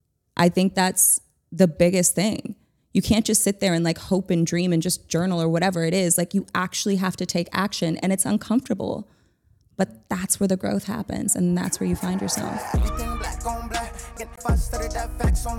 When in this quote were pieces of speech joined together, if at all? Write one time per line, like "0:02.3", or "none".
0:12.6